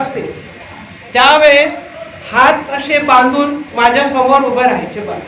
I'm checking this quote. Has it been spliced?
no; 0 cuts

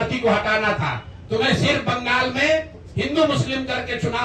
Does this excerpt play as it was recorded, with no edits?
yes; 0 cuts

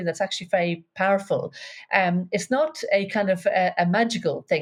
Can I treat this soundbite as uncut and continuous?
yes; 0 cuts

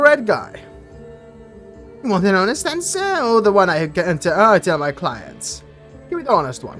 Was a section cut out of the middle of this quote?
no; 0 cuts

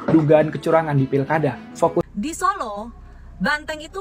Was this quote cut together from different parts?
yes; 1 cut; at 2.1 s

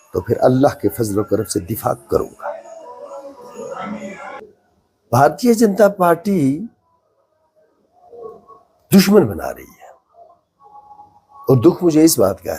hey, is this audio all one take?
no; 1 cut; at 4.4 s

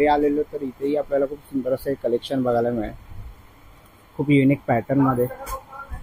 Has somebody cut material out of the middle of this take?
no; 0 cuts

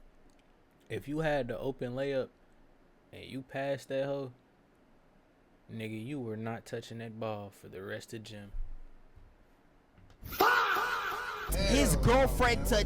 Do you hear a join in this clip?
yes; 1 cut; at 11.5 s

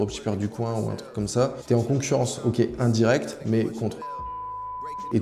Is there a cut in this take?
no; 0 cuts

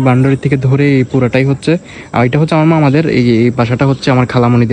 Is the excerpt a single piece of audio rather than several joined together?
yes; 0 cuts

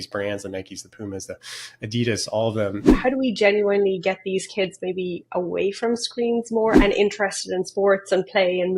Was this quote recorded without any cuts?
no; 1 cut; at 2.9 s

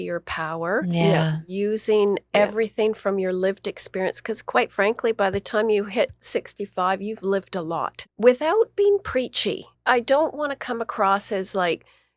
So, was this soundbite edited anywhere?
yes; 2 cuts; at 7.9 s, 9.7 s

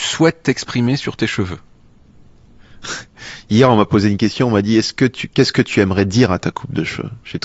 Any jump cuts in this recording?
no; 0 cuts

